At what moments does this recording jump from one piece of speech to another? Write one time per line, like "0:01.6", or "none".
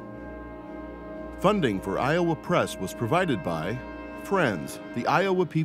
0:01.4